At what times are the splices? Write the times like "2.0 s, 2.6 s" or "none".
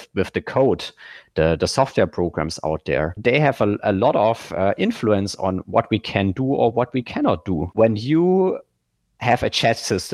3.1 s, 7.7 s